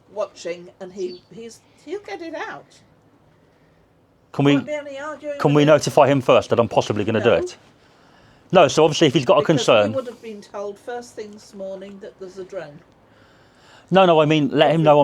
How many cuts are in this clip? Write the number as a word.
zero